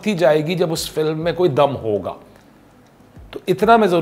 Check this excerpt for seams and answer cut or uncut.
uncut